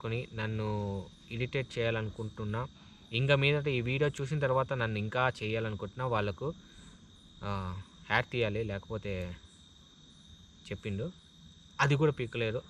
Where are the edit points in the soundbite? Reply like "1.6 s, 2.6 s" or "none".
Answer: none

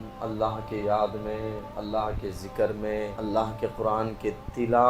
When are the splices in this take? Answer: 1.7 s, 3.1 s

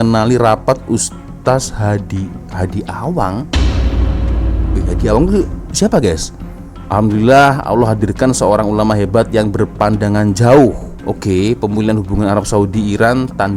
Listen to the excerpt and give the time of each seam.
none

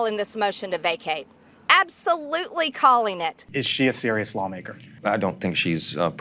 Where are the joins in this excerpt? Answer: 3.4 s, 4.9 s

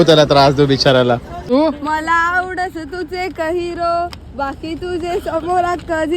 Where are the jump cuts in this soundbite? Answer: 1.5 s

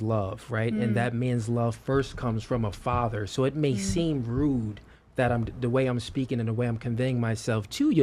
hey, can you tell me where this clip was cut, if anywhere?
none

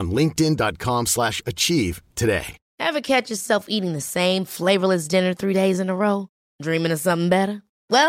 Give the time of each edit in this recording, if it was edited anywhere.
2.6 s

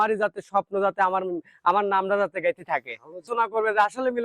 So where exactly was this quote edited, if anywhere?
3.2 s

